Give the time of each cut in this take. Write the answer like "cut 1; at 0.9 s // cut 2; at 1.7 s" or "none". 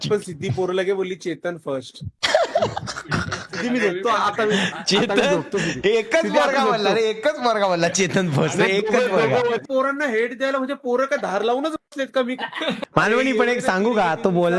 cut 1; at 2.1 s // cut 2; at 9.7 s // cut 3; at 12.8 s